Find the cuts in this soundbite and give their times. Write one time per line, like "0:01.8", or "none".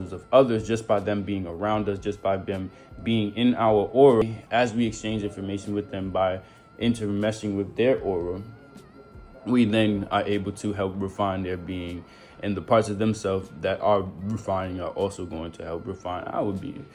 0:04.2